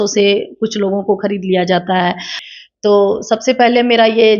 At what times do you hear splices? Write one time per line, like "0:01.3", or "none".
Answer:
0:02.3